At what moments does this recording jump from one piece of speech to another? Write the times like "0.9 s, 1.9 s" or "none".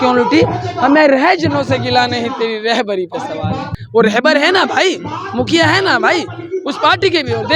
3.7 s